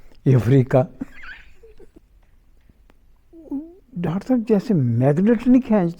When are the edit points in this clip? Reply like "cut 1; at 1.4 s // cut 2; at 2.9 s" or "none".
cut 1; at 2.0 s